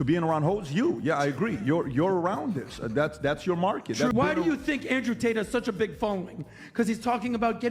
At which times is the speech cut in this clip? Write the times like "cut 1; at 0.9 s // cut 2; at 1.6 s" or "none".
cut 1; at 4.1 s